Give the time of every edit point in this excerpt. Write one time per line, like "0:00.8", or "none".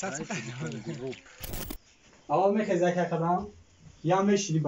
0:01.6